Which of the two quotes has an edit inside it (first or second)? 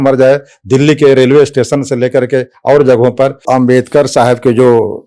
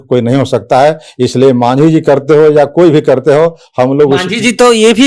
first